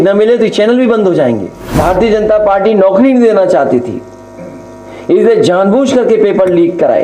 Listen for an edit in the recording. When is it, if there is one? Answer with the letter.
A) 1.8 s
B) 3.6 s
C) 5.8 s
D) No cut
A